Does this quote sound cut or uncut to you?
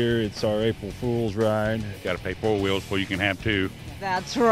cut